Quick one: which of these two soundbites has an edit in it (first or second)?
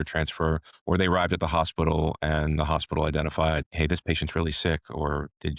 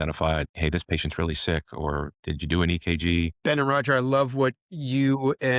second